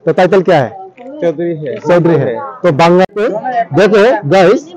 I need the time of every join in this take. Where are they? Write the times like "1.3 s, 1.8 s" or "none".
3.1 s